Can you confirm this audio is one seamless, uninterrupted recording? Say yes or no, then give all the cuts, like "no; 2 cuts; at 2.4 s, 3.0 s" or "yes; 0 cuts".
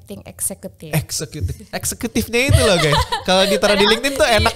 yes; 0 cuts